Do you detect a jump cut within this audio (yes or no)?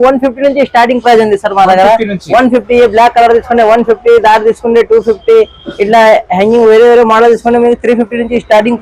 no